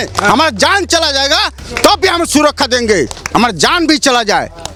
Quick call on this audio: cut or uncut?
uncut